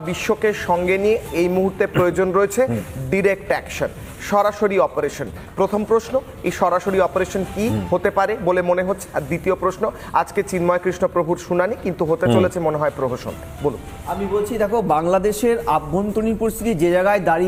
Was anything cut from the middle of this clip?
no; 0 cuts

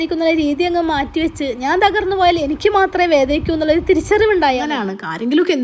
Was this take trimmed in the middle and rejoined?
yes; 1 cut; at 4.7 s

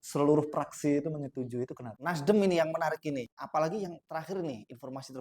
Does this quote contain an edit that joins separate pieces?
yes; 2 cuts; at 1.9 s, 3.3 s

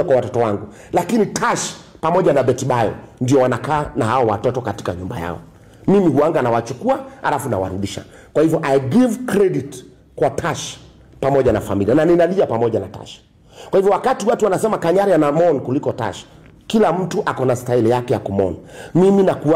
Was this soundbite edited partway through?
no; 0 cuts

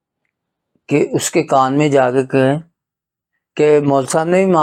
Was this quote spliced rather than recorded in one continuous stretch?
no; 0 cuts

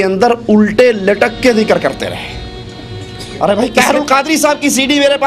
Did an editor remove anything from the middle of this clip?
yes; 1 cut; at 3.7 s

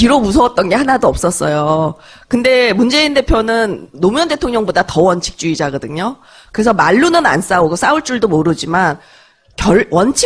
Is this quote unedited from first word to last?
yes; 0 cuts

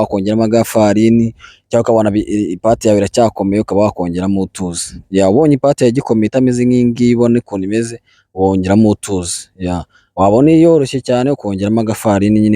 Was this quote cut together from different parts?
no; 0 cuts

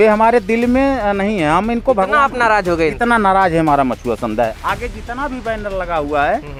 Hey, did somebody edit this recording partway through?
no; 0 cuts

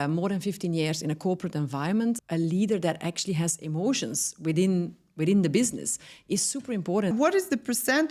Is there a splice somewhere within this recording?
yes; 2 cuts; at 2.2 s, 7.1 s

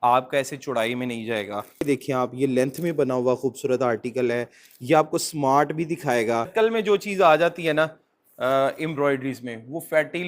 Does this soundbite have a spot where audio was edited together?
yes; 2 cuts; at 1.8 s, 6.5 s

